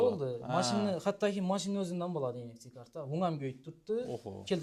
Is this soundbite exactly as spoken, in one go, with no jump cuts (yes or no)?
yes